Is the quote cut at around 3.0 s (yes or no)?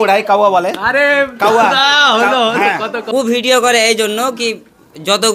yes